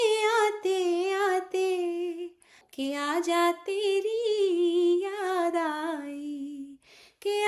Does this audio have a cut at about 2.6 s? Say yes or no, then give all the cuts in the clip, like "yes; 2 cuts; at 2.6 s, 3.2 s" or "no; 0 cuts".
yes; 1 cut; at 2.6 s